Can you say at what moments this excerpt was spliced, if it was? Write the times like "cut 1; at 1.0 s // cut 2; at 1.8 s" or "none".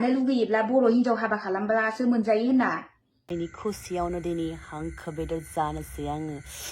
cut 1; at 3.5 s